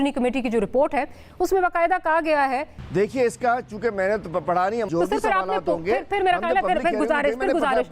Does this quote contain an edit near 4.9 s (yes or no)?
yes